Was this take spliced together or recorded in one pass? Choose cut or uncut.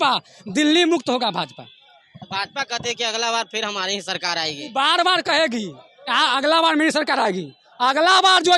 uncut